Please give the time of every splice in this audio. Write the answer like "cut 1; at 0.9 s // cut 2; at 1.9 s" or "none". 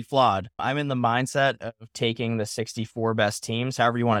none

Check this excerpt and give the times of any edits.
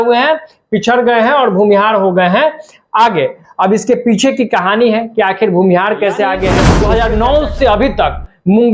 cut 1; at 6.7 s

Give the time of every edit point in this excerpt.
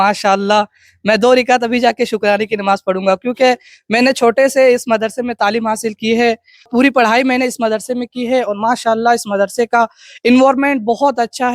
cut 1; at 6.7 s

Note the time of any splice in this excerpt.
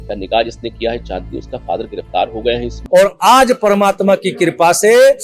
cut 1; at 2.7 s

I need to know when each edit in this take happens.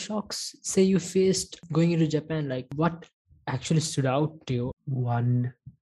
cut 1; at 1.6 s // cut 2; at 2.7 s // cut 3; at 4.7 s

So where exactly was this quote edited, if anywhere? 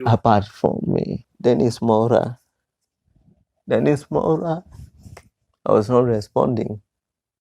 cut 1; at 1.2 s

